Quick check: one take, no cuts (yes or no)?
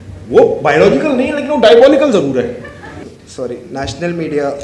no